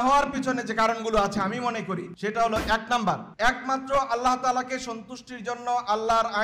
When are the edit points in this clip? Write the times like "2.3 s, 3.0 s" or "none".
2.1 s, 3.3 s